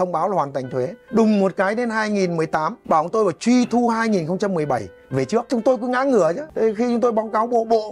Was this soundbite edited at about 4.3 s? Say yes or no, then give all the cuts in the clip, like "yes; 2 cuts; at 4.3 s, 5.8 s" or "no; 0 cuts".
no; 4 cuts; at 1.0 s, 2.8 s, 5.5 s, 6.5 s